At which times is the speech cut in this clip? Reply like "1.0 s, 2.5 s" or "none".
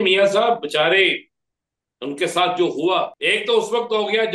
3.1 s